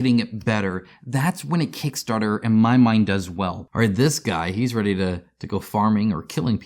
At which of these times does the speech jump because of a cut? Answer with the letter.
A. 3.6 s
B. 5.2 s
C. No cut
A